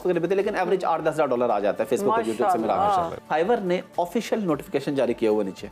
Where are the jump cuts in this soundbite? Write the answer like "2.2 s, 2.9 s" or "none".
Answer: 3.1 s